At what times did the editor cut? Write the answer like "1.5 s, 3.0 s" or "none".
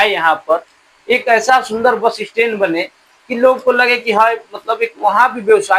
none